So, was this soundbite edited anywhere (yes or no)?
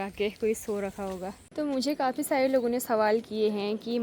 yes